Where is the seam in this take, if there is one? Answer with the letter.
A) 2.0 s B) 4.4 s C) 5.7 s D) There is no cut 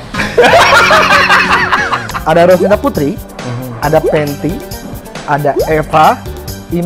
A